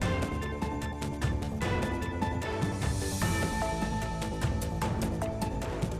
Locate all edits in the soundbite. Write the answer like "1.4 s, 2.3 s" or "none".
1.1 s